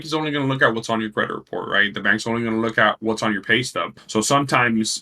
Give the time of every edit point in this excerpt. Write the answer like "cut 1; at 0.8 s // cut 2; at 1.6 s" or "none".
cut 1; at 4.0 s